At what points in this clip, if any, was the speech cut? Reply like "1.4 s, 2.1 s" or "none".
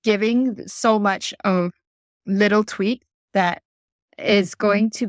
none